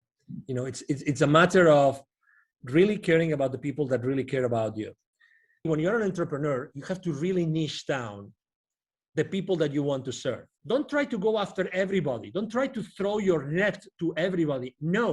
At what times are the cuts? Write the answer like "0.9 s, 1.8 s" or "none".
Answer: 5.7 s, 10.5 s